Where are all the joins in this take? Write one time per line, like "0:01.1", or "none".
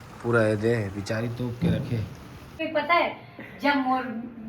0:02.6

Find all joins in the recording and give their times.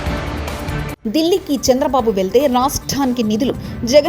0:00.9

